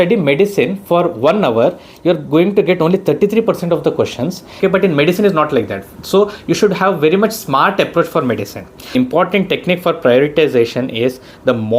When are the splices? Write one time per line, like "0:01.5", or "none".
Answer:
0:04.5
0:08.9